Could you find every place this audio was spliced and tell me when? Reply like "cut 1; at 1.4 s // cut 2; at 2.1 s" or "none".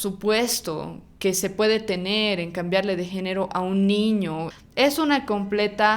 cut 1; at 4.5 s